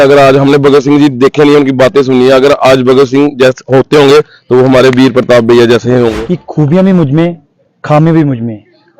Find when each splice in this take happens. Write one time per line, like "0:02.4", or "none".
0:06.1

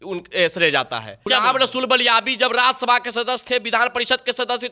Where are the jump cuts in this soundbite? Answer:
0:01.1

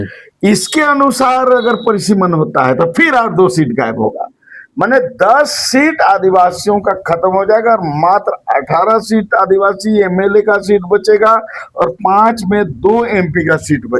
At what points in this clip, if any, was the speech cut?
none

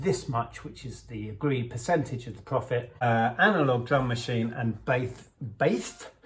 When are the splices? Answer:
0:02.9

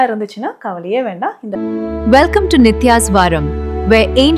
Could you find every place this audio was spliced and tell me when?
0:01.5

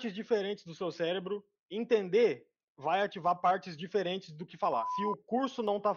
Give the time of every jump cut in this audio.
0:04.9

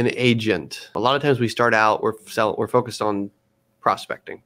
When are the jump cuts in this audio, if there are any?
0:00.9

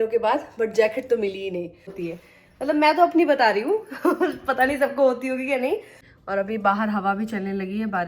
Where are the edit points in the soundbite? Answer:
0:02.0
0:06.0

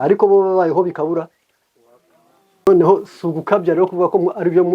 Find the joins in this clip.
0:02.7

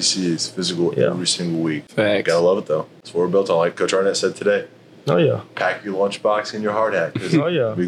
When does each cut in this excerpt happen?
0:01.8
0:03.0

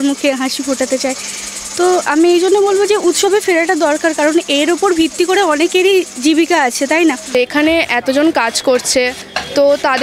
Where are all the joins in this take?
0:07.3

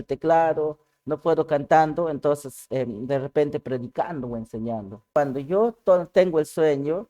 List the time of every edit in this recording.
0:05.1

